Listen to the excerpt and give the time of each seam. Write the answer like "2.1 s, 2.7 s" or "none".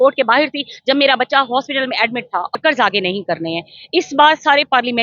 2.5 s